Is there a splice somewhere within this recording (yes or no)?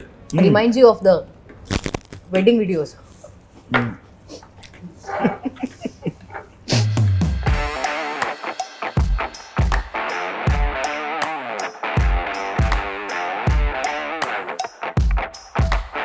no